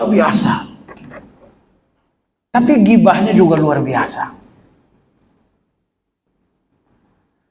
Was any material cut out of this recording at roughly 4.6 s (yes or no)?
no